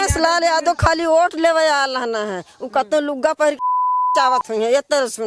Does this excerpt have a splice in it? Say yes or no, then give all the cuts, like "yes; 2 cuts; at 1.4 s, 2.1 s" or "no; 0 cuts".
no; 0 cuts